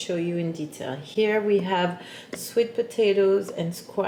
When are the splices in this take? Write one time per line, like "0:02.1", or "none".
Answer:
none